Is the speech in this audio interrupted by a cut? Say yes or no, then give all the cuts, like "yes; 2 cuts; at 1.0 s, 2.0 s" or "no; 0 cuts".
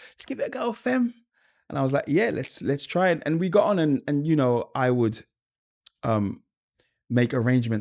no; 0 cuts